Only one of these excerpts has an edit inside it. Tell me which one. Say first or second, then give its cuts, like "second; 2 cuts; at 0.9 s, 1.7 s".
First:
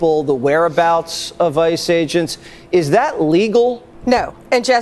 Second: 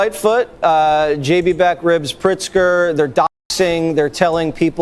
first; 1 cut; at 3.9 s